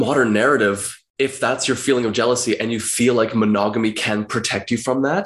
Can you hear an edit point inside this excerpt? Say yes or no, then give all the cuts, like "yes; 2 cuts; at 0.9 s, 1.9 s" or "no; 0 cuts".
no; 0 cuts